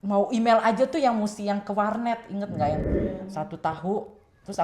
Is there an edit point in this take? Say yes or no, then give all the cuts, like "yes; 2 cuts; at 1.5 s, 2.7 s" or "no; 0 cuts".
yes; 1 cut; at 2.9 s